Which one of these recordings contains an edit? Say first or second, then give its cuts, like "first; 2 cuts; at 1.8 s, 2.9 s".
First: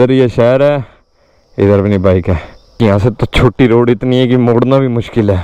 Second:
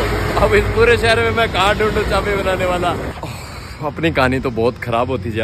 second; 1 cut; at 3.1 s